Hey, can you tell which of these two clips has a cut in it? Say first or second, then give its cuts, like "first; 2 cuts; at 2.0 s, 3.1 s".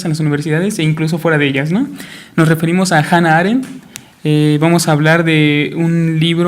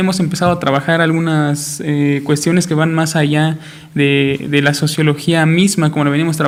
first; 1 cut; at 4.8 s